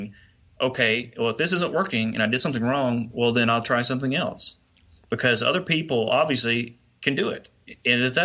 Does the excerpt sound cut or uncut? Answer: uncut